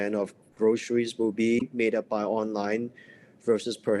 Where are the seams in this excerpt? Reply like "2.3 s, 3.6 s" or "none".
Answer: none